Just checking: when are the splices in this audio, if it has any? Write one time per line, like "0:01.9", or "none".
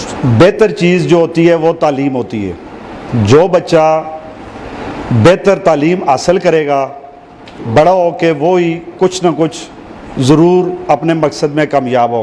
none